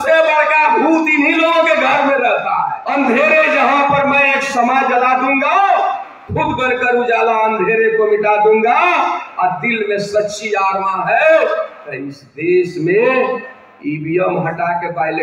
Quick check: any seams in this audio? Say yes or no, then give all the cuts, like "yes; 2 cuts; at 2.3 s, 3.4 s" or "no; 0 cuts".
yes; 1 cut; at 2.8 s